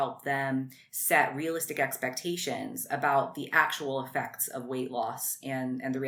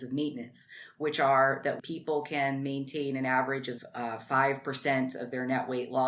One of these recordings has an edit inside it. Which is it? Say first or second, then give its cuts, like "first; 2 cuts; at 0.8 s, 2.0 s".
second; 2 cuts; at 1.8 s, 3.7 s